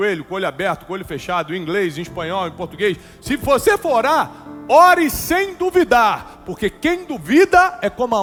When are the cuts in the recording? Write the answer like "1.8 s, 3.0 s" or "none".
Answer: none